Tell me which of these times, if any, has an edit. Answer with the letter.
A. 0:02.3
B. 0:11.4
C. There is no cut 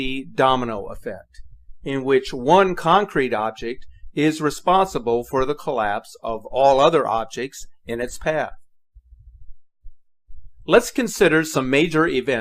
A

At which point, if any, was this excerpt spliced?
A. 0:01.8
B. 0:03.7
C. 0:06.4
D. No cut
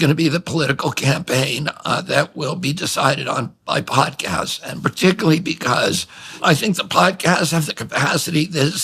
C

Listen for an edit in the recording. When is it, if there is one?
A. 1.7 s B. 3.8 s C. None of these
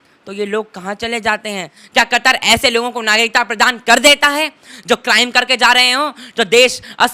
A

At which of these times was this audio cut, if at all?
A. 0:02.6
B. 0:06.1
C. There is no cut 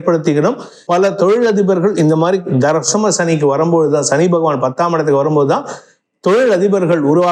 C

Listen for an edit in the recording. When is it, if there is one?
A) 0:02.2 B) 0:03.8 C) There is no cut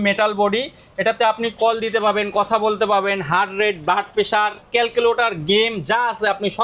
C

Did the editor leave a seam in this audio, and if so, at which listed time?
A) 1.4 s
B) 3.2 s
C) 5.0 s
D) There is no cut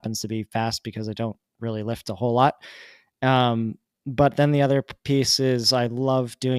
D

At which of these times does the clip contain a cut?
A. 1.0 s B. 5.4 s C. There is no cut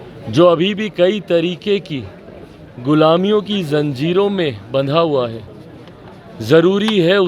C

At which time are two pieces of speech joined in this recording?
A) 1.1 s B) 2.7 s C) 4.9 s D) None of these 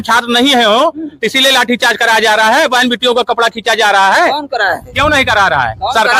D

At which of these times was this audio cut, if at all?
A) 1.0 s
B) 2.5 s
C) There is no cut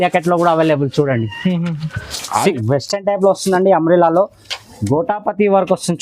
B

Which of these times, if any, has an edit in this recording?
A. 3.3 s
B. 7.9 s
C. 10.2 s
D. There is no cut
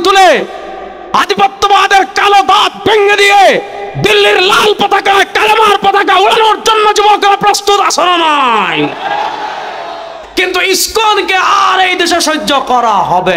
C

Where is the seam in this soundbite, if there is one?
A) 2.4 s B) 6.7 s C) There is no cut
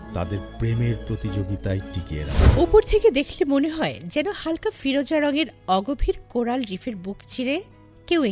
A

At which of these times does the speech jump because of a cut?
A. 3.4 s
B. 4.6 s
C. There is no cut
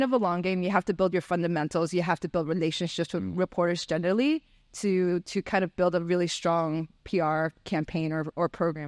C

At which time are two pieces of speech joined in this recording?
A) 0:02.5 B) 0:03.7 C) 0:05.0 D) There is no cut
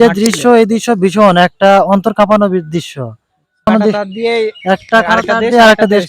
B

